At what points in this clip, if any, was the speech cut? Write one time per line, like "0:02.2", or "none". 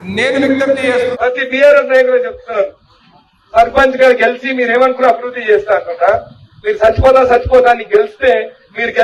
0:01.1